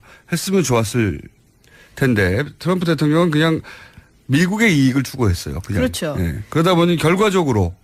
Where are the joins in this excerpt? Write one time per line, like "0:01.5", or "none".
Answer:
0:05.4